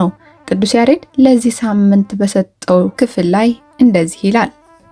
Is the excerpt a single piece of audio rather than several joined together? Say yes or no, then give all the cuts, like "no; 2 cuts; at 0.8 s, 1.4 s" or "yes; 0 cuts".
no; 1 cut; at 2.9 s